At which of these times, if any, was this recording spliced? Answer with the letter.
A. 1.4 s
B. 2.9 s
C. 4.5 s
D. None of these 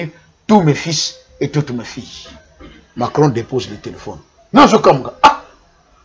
D